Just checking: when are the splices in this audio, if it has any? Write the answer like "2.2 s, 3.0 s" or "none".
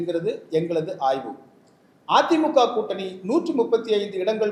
none